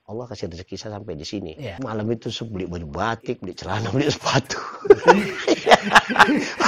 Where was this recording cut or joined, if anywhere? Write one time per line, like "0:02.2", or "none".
0:01.8